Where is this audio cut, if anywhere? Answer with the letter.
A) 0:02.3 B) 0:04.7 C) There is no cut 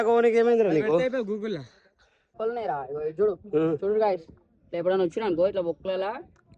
A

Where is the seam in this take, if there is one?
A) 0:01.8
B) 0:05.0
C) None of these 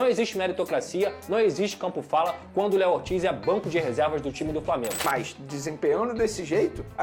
B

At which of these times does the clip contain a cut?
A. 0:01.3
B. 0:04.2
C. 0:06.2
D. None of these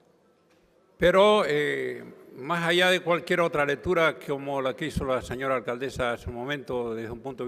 A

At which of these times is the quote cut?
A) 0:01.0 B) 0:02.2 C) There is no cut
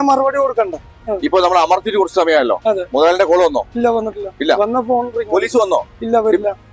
A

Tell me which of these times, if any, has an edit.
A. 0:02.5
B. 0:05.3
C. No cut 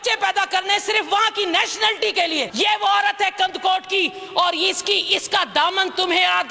A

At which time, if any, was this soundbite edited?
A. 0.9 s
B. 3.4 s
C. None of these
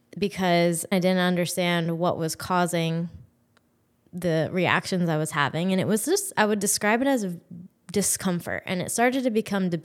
A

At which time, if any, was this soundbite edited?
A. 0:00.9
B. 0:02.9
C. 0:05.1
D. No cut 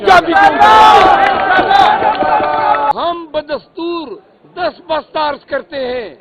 B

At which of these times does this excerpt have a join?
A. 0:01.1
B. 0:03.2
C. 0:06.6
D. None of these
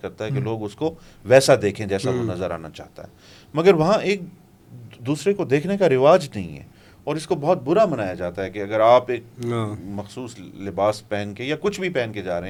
D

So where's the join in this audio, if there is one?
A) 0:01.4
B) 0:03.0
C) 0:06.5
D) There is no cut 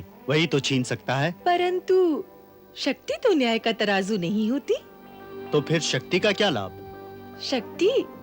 A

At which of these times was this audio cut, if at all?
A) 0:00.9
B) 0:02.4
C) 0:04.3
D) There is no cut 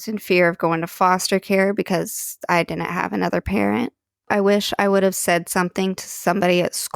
C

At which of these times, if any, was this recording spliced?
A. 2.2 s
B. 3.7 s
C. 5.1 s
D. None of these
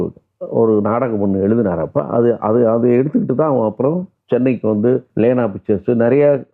C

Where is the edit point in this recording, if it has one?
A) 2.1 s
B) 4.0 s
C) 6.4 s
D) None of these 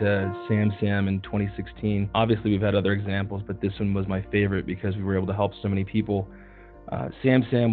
A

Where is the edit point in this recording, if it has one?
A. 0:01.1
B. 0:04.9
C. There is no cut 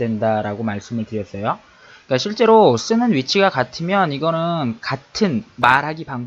C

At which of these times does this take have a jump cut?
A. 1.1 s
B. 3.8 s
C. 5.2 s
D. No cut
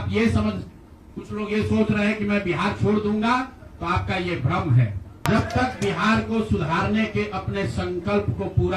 C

